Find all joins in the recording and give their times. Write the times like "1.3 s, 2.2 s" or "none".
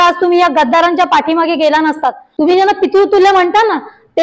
2.2 s

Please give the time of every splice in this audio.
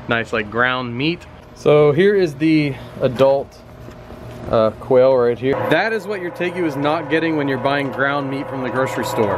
1.5 s, 5.5 s

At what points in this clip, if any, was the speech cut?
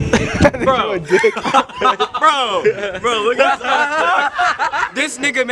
none

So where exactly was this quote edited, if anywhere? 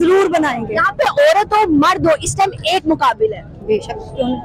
none

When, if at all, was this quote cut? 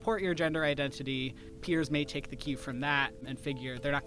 1.5 s, 3.2 s

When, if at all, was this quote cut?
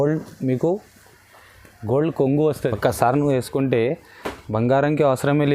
2.6 s

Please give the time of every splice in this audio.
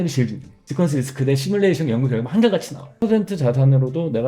3.0 s

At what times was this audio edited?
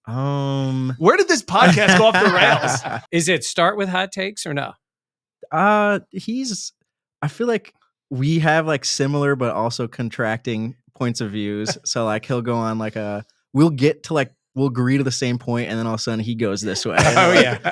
3.0 s

